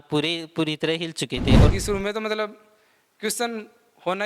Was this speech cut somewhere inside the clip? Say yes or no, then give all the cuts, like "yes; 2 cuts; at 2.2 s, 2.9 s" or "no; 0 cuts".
yes; 1 cut; at 1.7 s